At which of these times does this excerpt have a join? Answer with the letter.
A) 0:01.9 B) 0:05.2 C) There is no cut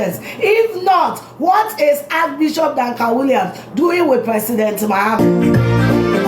B